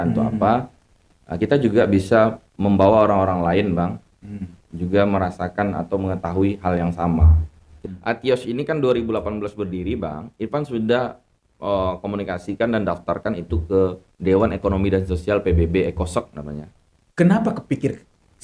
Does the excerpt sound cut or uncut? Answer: cut